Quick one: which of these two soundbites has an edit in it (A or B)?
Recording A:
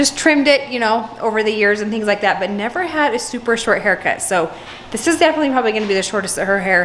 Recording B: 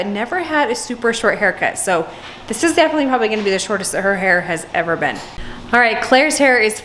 B